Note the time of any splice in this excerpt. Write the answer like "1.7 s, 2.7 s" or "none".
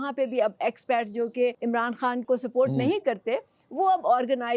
2.0 s